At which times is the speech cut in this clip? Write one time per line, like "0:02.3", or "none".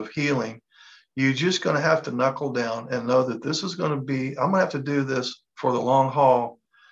none